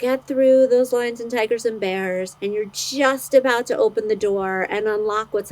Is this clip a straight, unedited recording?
no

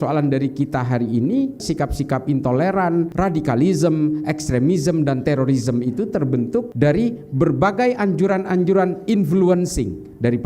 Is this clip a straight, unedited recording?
no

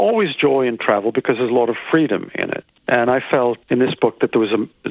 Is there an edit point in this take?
yes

